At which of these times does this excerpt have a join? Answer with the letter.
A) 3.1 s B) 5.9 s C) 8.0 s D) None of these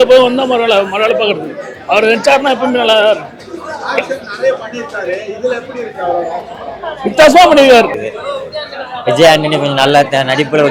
C